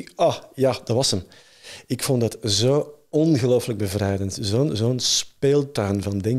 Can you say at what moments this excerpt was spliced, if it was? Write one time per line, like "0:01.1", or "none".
none